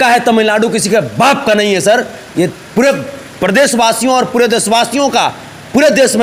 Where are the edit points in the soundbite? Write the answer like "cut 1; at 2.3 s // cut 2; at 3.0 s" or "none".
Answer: none